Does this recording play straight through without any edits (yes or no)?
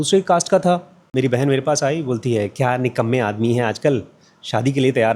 no